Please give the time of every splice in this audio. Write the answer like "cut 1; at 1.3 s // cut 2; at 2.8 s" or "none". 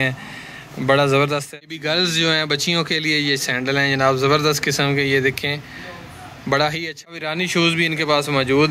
cut 1; at 1.5 s // cut 2; at 7.2 s